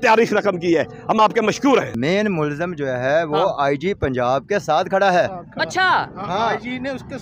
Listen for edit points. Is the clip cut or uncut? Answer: cut